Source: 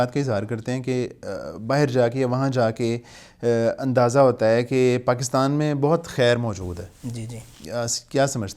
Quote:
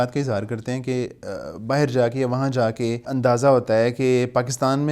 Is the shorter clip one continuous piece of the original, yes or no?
no